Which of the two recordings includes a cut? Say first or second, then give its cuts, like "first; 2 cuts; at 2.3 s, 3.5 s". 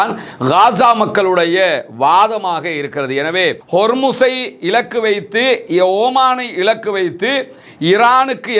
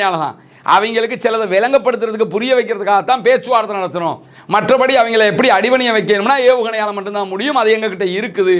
first; 1 cut; at 3.6 s